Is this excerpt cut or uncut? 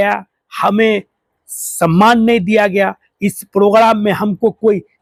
uncut